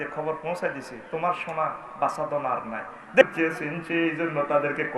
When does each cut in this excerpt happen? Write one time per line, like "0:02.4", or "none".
0:03.2

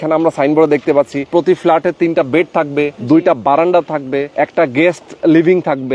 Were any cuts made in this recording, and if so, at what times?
0:01.3
0:03.0
0:04.3

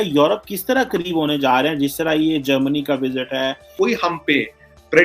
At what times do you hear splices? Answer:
0:03.7

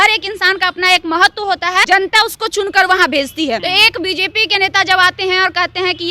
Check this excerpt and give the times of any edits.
0:01.9
0:03.6

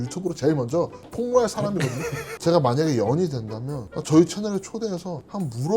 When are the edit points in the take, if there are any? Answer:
0:02.2

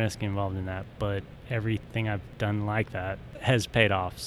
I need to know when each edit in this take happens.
0:01.4
0:03.5

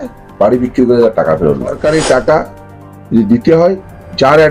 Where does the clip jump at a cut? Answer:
0:01.8

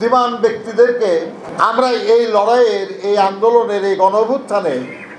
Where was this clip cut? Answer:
0:01.4

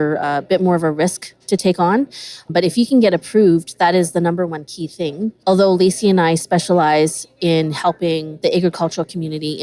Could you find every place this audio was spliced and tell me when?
0:05.4
0:08.3

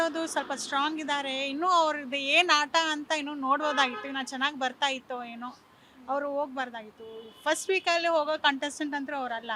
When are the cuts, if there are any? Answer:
none

